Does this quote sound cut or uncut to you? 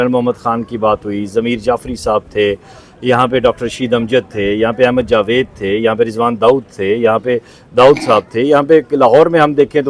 uncut